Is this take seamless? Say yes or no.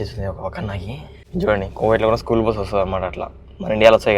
no